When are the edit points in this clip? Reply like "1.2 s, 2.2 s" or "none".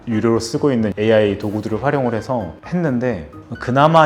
0.9 s